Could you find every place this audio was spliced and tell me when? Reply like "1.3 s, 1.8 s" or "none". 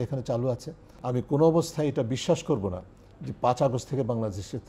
1.0 s

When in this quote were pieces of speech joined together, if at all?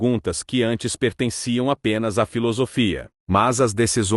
3.1 s

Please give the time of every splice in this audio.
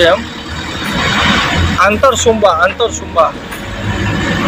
none

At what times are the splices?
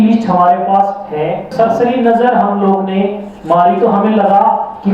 1.5 s

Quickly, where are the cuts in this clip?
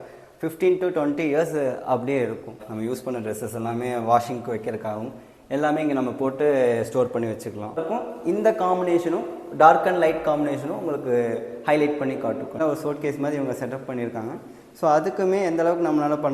2.7 s, 7.8 s, 12.5 s

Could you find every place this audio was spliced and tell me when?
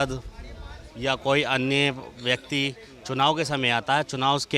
none

